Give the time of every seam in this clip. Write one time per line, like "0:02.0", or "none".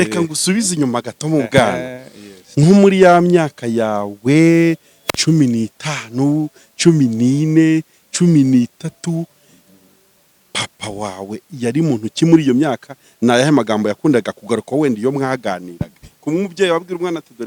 none